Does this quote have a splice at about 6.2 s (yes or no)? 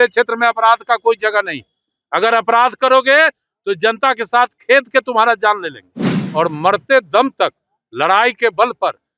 yes